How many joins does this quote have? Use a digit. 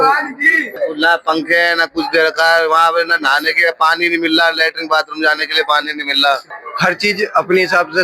2